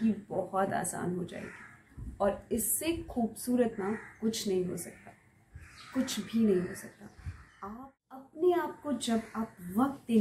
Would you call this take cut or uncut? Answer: cut